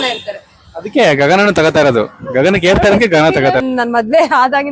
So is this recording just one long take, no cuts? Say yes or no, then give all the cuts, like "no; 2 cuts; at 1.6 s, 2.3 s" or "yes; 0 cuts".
no; 1 cut; at 3.6 s